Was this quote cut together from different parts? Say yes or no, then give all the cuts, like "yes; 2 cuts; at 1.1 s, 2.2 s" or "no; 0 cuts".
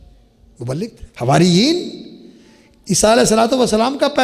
yes; 1 cut; at 1.0 s